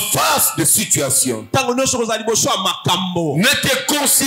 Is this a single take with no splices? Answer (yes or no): yes